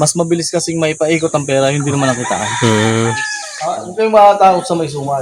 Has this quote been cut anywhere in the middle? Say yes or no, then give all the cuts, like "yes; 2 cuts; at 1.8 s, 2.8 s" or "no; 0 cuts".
yes; 1 cut; at 3.9 s